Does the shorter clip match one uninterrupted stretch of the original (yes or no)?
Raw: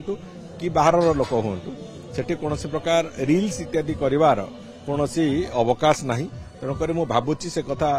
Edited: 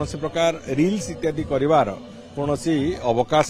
yes